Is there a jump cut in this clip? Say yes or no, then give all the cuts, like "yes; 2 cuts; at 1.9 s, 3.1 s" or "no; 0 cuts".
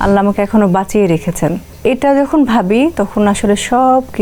no; 0 cuts